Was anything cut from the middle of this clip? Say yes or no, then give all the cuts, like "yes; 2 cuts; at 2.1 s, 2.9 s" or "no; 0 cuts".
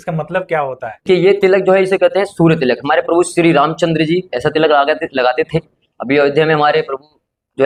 no; 0 cuts